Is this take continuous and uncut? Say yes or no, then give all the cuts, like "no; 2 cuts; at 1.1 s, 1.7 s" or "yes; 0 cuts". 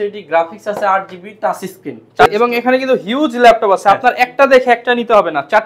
no; 1 cut; at 2.3 s